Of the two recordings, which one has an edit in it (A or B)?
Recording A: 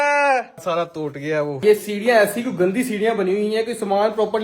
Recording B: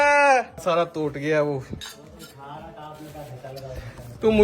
A